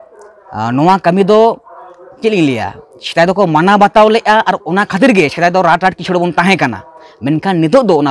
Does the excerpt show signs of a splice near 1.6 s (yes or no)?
no